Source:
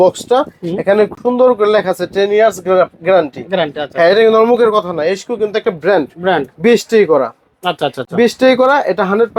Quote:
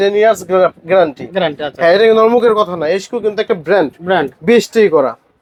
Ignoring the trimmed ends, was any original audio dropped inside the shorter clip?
no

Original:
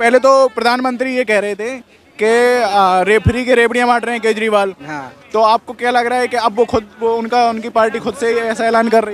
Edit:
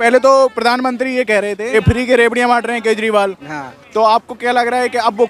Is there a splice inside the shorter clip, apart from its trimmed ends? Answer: yes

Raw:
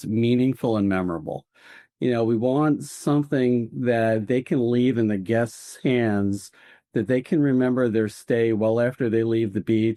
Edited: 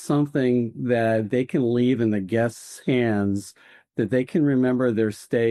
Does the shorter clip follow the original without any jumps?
yes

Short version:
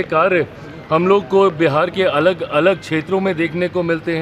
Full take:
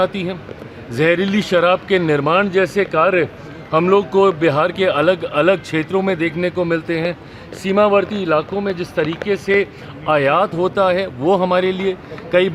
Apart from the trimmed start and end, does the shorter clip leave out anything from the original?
no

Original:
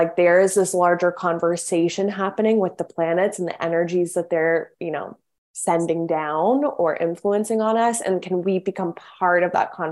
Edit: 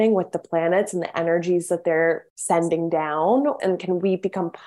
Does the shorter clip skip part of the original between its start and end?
yes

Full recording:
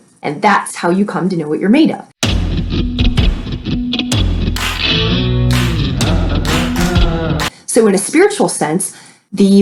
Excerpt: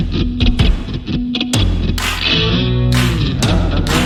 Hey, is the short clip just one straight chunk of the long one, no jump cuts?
yes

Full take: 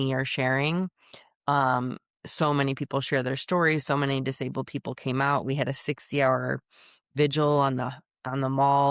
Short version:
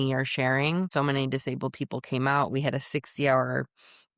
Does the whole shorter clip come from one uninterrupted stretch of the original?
no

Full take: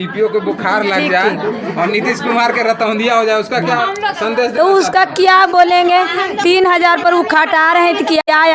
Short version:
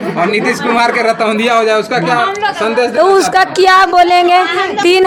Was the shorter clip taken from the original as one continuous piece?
yes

